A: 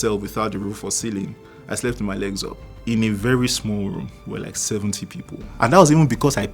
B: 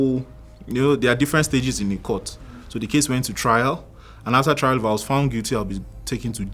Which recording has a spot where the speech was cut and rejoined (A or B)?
A